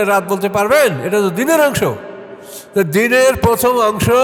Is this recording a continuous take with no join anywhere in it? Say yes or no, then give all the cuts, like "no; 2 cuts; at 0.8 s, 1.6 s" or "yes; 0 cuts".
yes; 0 cuts